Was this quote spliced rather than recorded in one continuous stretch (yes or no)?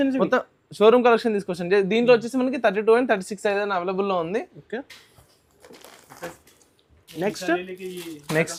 no